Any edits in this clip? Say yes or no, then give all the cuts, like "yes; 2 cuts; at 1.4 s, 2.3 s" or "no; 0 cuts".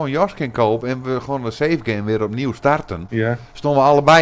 yes; 1 cut; at 3.0 s